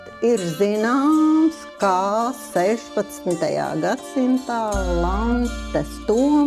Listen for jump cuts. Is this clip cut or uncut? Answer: uncut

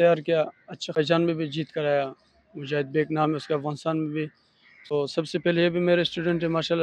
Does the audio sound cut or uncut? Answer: cut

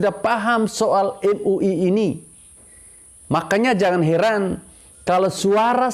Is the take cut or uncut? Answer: uncut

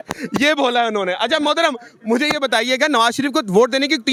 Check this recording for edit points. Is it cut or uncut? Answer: uncut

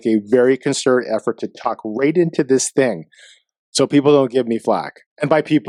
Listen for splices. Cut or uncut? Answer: uncut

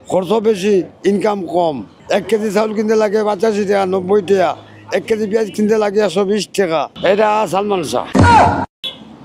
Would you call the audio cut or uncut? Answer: cut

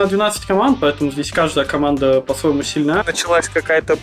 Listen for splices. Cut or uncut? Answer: cut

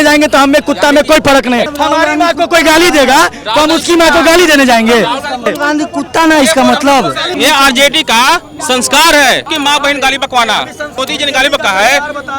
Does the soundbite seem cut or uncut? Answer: cut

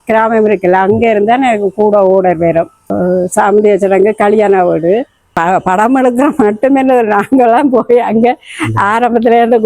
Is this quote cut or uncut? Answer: cut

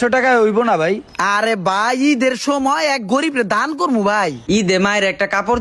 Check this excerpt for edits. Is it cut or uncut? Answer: cut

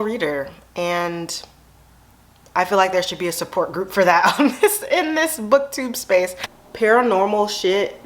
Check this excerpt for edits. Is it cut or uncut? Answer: cut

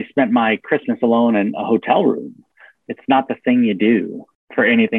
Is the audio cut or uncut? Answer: uncut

